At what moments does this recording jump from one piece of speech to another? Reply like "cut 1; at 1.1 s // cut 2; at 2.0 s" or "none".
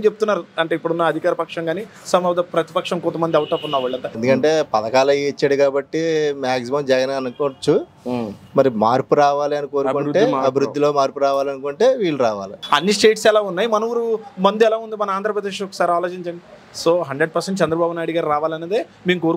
cut 1; at 4.1 s // cut 2; at 12.6 s